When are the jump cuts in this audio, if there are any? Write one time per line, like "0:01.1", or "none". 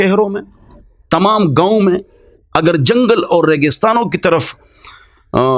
none